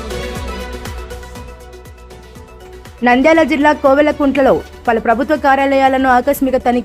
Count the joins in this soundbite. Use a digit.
1